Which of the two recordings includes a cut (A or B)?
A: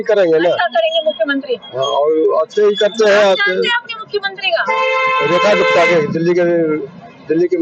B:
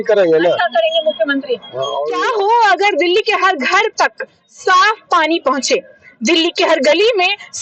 B